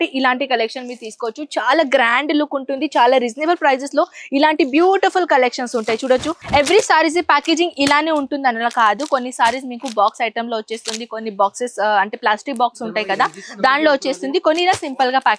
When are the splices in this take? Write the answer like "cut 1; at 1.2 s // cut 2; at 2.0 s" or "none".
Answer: cut 1; at 6.4 s